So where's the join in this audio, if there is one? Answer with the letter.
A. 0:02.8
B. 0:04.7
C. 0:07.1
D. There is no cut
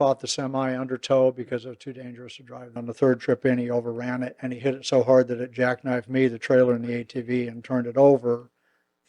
A